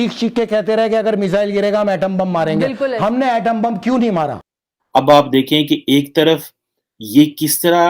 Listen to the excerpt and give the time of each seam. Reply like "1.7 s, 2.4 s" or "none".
4.4 s